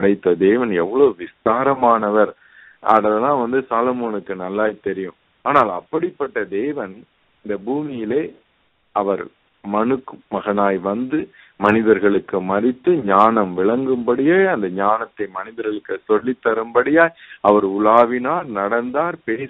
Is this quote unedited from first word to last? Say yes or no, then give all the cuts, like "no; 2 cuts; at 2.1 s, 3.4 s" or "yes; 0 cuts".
yes; 0 cuts